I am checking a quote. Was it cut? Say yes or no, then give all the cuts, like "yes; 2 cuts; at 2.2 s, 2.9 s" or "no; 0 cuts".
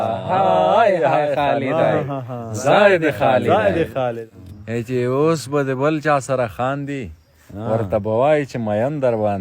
yes; 1 cut; at 4.2 s